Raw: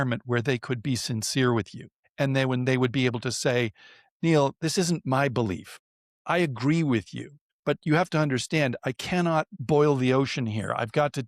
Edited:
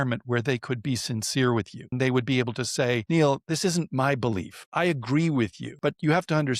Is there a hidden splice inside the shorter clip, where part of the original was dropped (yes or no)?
yes